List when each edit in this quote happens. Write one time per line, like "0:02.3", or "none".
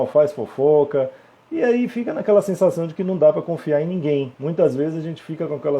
0:04.4